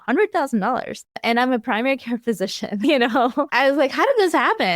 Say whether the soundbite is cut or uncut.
cut